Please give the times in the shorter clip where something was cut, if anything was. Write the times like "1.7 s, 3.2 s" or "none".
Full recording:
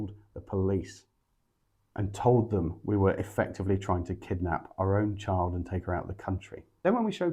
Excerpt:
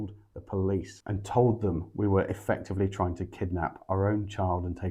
1.0 s